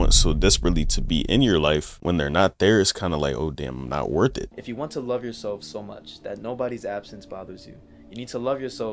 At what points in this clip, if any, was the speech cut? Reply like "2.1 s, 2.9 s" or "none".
1.9 s, 4.5 s